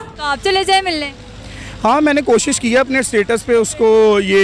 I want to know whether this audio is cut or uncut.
uncut